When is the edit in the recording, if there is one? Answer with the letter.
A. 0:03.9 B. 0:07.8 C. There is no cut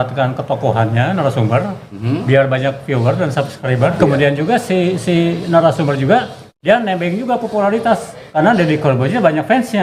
A